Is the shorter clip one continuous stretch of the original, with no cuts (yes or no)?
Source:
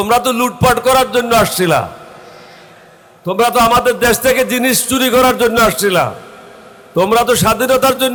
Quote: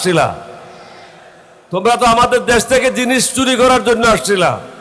yes